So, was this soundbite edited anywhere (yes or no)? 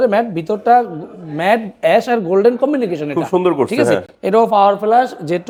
no